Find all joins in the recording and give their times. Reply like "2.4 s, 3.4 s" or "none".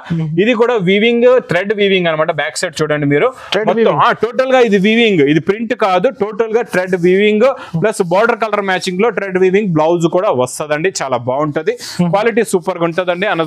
none